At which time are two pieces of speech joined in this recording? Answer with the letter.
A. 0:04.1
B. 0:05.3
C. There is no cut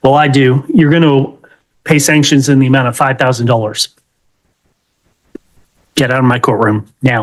C